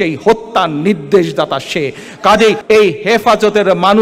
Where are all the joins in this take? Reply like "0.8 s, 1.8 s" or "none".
2.6 s